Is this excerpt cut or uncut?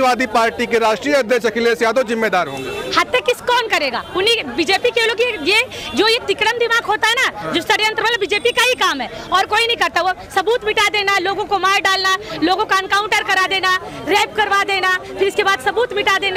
uncut